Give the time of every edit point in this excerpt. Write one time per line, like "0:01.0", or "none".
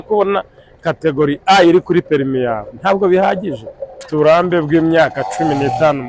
0:04.1

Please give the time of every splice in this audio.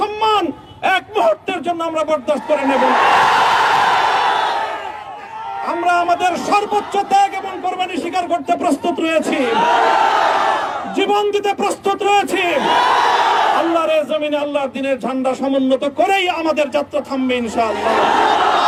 none

